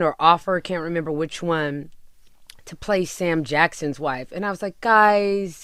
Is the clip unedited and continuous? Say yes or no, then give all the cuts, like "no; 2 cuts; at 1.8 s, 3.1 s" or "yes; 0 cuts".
yes; 0 cuts